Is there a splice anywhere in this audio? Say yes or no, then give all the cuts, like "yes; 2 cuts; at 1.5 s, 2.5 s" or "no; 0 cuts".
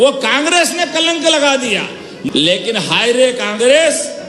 yes; 1 cut; at 2.1 s